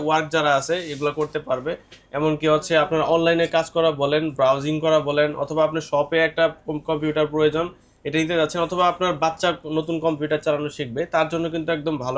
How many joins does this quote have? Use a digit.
0